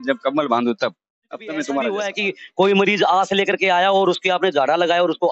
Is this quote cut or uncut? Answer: cut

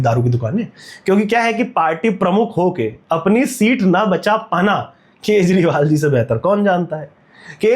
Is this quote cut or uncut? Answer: uncut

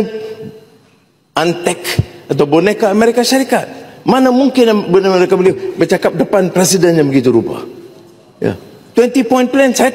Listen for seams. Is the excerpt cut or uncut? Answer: uncut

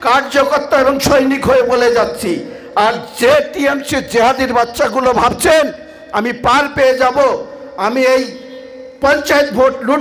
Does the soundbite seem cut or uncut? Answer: uncut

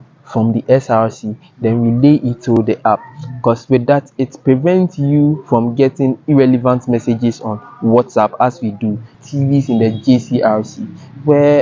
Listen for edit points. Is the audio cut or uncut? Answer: cut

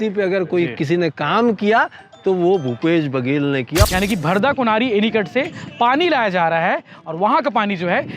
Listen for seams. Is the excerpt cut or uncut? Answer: cut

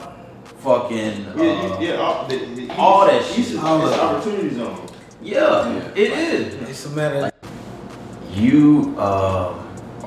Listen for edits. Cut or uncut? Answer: cut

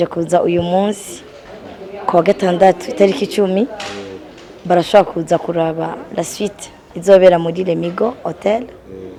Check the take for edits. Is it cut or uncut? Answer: uncut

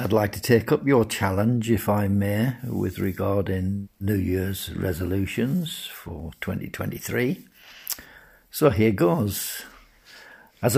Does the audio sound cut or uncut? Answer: uncut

